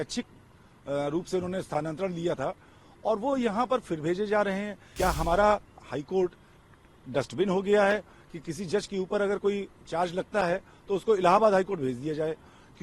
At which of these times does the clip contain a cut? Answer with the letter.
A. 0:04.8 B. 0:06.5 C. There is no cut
A